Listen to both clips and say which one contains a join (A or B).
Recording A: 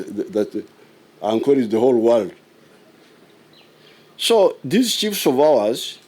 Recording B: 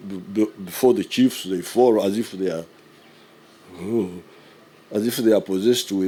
A